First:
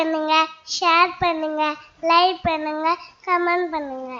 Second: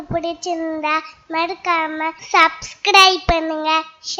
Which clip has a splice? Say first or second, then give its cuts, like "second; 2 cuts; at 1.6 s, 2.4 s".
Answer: second; 1 cut; at 2.2 s